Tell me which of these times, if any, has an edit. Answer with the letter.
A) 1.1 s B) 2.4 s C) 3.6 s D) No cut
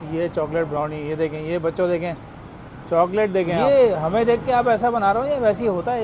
C